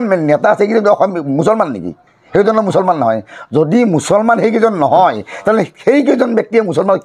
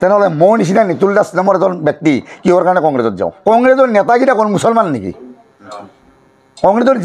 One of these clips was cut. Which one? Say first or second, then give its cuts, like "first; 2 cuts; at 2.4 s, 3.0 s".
second; 1 cut; at 3.4 s